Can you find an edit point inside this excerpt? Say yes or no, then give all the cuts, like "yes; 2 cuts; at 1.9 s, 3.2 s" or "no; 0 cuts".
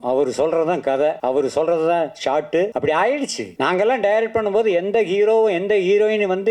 yes; 3 cuts; at 1.2 s, 2.7 s, 3.4 s